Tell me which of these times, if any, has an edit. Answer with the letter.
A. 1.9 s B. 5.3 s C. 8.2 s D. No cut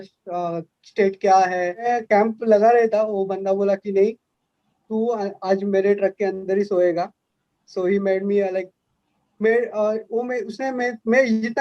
A